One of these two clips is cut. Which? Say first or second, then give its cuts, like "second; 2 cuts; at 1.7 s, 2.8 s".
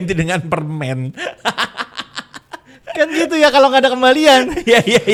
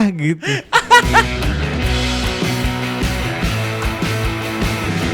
second; 1 cut; at 1.3 s